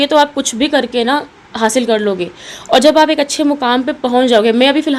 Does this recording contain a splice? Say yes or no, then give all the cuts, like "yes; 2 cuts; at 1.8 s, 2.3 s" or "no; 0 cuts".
no; 0 cuts